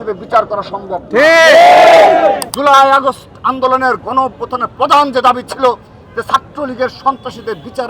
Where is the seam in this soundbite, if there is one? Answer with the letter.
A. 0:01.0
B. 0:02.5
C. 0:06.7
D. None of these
B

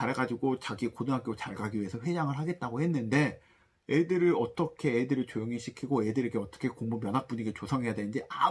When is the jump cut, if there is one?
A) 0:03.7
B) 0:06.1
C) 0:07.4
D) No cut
D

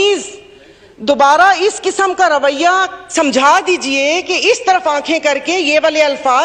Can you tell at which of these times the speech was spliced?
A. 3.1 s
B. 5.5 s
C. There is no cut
C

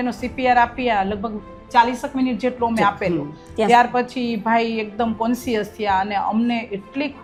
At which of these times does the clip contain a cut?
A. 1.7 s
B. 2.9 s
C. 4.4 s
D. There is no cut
D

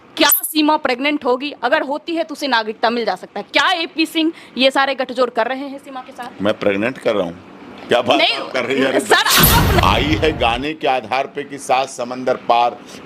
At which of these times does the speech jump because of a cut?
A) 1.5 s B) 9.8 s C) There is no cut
B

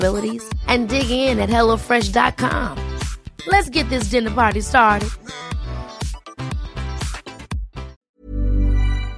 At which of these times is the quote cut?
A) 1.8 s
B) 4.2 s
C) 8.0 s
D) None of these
C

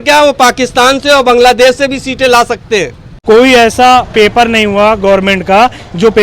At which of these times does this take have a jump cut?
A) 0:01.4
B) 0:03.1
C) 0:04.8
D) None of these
B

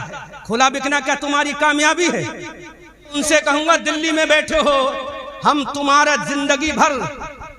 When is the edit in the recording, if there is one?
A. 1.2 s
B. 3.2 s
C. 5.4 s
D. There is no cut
B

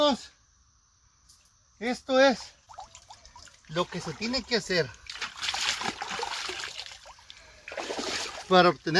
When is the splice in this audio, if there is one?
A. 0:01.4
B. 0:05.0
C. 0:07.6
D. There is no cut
D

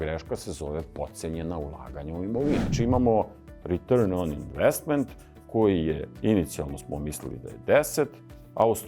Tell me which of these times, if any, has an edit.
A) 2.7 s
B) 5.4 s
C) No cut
A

